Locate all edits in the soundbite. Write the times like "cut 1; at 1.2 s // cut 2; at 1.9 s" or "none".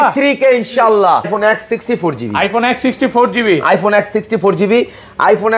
cut 1; at 1.3 s